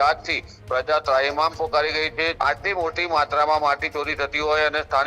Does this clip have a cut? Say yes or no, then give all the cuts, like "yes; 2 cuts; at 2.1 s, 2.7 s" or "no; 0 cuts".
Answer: yes; 1 cut; at 2.3 s